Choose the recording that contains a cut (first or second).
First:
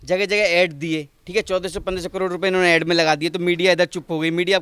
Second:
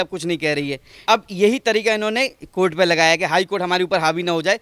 second